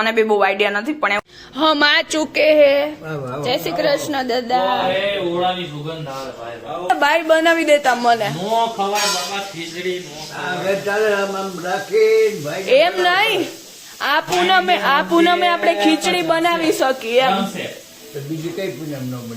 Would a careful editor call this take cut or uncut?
cut